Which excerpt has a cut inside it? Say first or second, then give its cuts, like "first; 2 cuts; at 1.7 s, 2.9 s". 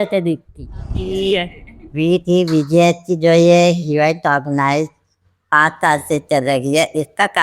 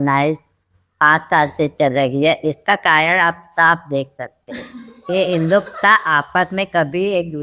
first; 1 cut; at 1.0 s